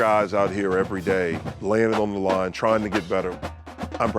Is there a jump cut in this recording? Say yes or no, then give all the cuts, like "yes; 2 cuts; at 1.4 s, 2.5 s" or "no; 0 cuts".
yes; 2 cuts; at 1.5 s, 3.3 s